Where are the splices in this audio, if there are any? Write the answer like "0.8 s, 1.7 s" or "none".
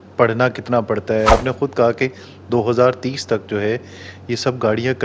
1.3 s